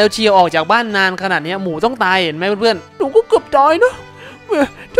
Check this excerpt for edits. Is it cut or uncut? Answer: cut